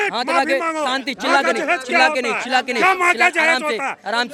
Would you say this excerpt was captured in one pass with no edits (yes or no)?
yes